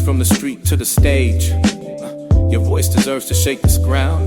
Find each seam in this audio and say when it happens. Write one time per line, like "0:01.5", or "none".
none